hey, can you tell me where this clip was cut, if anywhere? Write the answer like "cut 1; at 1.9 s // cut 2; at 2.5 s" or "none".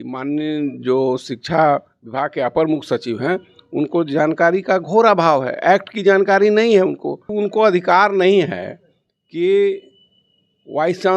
cut 1; at 7.2 s